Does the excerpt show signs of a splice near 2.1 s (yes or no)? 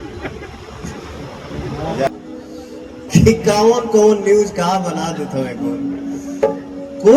yes